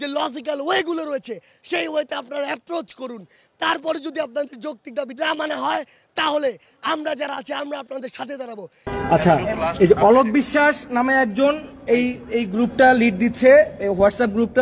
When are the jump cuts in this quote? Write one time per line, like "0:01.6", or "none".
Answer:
0:08.9